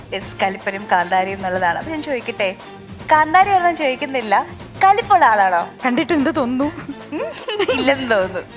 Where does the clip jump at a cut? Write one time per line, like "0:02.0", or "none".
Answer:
0:05.8
0:07.1